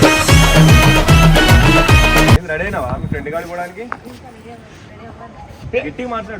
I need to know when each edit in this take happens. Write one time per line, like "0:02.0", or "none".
0:02.4